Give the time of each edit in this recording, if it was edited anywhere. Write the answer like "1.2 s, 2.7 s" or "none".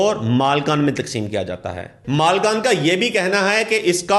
2.0 s

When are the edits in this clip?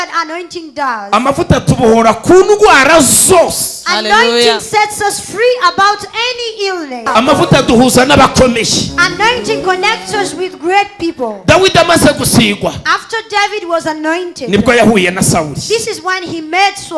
7.0 s

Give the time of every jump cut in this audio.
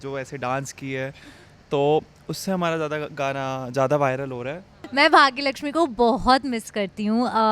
4.7 s

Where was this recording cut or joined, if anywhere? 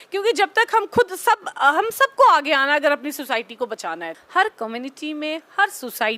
4.2 s

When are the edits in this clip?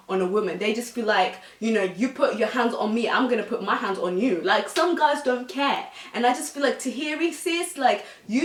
none

